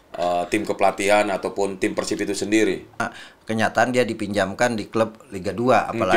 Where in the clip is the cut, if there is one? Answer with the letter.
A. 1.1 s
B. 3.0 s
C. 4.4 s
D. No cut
B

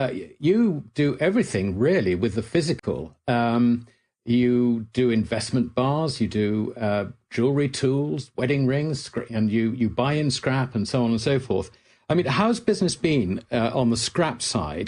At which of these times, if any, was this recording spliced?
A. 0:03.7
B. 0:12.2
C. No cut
A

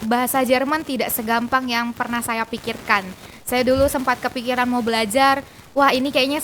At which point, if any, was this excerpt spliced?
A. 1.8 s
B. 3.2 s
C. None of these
C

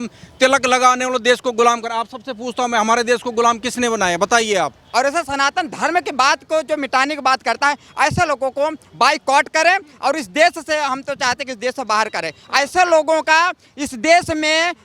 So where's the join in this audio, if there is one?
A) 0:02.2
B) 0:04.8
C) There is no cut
B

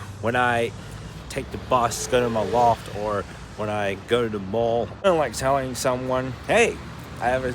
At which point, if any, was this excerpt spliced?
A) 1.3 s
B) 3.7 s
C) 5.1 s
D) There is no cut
C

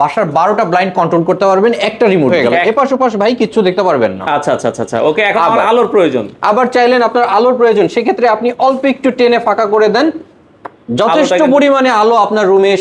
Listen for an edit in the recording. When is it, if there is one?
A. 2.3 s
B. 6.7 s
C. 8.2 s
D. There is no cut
A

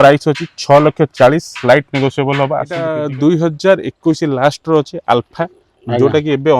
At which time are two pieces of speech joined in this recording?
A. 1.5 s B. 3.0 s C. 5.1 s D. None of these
B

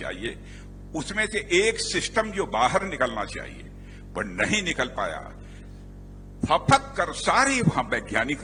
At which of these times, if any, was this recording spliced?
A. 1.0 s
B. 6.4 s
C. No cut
C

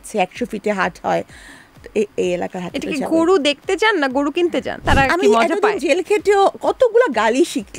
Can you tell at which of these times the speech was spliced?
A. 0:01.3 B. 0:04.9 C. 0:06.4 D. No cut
B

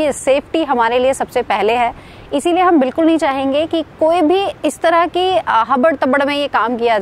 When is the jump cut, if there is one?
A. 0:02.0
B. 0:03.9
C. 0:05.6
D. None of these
D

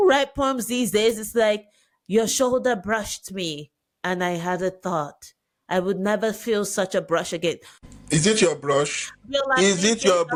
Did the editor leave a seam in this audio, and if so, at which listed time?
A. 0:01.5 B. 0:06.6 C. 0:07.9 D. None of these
D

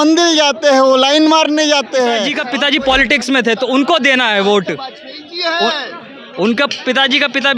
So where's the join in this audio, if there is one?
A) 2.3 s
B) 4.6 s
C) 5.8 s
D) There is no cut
A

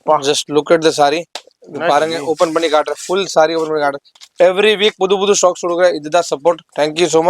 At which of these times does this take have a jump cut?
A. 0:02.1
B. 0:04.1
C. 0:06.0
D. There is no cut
B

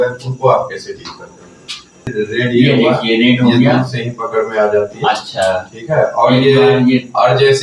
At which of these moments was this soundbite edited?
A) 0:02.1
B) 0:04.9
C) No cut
A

